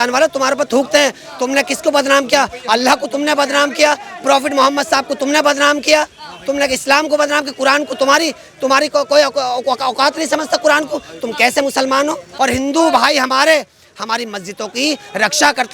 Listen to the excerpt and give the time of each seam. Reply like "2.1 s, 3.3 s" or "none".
12.3 s